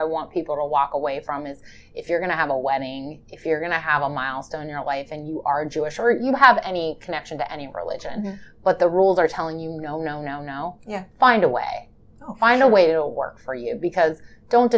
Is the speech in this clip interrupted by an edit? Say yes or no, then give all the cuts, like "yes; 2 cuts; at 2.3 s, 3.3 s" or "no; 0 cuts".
no; 0 cuts